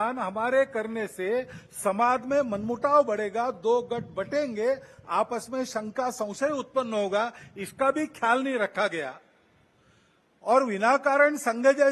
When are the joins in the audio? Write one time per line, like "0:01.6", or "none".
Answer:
none

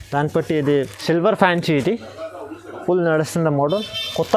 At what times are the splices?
0:00.9

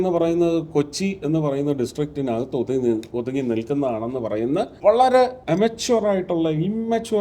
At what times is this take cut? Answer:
0:04.7
0:05.4

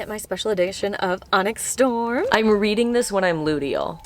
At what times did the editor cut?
0:02.3

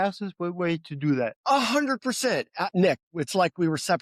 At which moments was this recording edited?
0:01.4
0:02.7

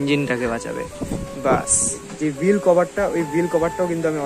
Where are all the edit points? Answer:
0:02.1

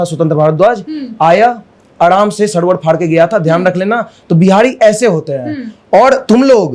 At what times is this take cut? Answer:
none

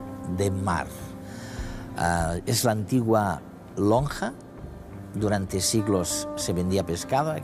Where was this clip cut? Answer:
0:04.8

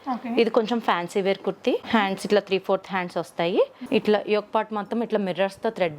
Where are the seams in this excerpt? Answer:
0:01.8
0:03.8

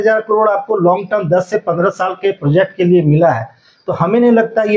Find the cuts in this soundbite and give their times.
none

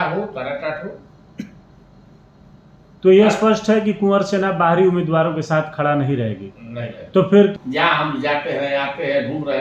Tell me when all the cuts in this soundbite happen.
0:07.5

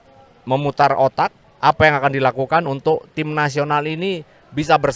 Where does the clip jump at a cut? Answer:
0:01.4

